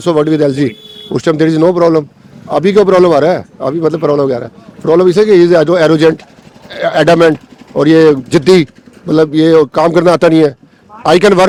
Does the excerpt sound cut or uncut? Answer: uncut